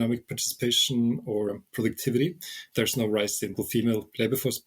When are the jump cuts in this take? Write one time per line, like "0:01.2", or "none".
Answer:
0:01.5
0:03.5